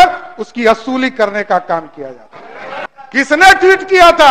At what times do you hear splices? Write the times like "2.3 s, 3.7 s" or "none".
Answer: 2.9 s